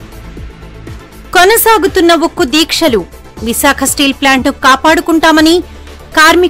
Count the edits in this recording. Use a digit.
0